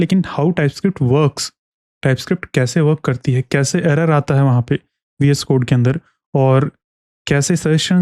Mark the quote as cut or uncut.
uncut